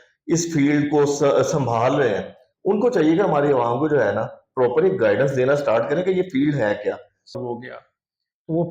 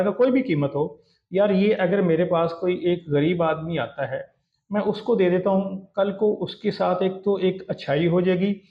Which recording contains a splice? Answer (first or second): first